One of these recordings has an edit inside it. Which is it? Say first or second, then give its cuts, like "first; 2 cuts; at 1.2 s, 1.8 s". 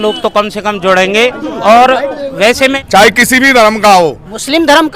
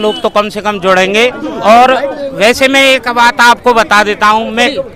first; 1 cut; at 2.8 s